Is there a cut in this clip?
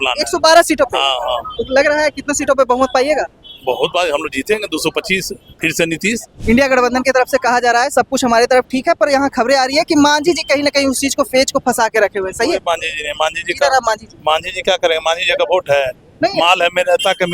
yes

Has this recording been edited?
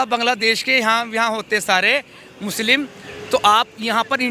no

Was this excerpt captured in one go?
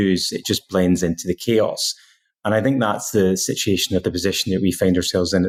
yes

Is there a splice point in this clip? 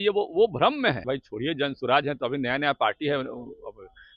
yes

